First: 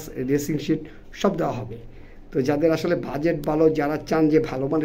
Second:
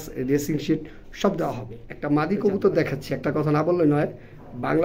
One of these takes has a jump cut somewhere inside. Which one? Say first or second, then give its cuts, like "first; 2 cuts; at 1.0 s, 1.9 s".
second; 1 cut; at 2.0 s